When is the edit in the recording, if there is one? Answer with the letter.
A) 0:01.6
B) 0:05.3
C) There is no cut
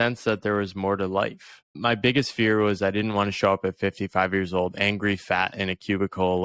A